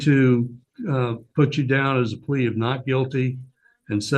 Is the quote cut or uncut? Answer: uncut